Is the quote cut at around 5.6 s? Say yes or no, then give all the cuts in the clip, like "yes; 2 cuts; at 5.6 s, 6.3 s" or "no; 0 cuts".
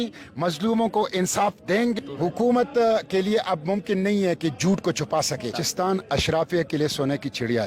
yes; 2 cuts; at 2.0 s, 5.6 s